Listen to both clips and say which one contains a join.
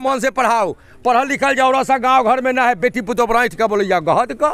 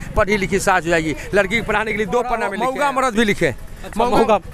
second; 1 cut; at 2.5 s

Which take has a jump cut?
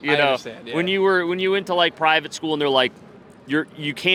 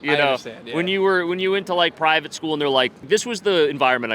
second; 1 cut; at 3.1 s

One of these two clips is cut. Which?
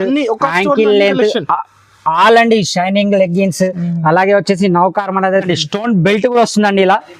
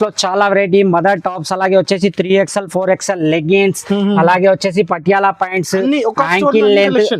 first; 1 cut; at 5.4 s

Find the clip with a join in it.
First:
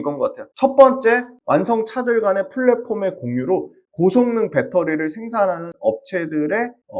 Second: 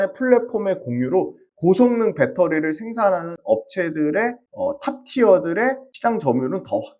first; 1 cut; at 1.3 s

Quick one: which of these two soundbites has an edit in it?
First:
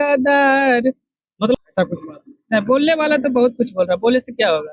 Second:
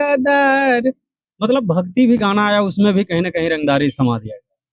first; 1 cut; at 1.6 s

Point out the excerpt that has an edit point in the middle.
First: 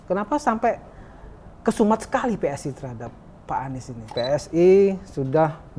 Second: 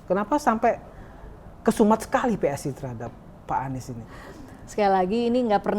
first; 1 cut; at 4.1 s

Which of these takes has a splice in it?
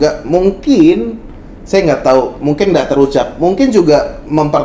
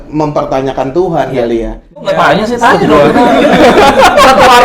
second; 1 cut; at 2.0 s

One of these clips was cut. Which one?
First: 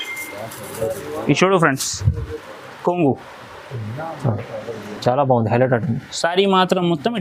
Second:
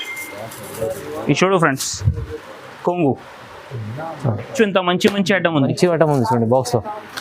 second; 1 cut; at 4.5 s

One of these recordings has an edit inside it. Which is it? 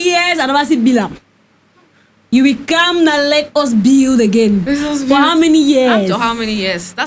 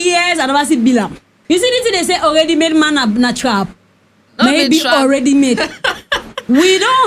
second; 1 cut; at 1.3 s

